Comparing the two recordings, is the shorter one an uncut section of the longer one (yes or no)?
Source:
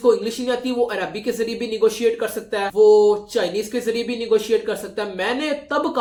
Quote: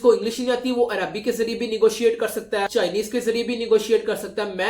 no